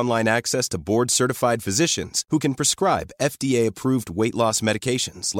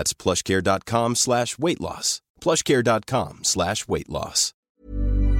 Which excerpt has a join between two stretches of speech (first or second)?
second